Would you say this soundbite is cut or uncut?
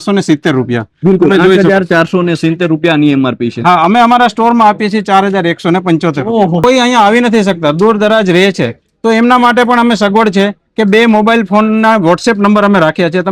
cut